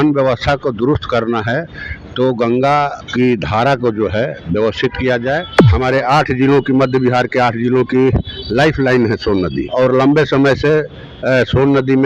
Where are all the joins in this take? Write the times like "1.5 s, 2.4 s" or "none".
3.0 s, 5.6 s, 9.6 s